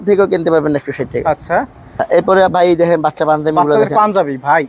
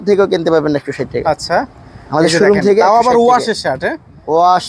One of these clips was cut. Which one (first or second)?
first